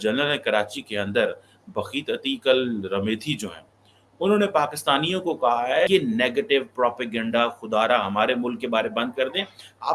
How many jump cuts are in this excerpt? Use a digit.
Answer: 1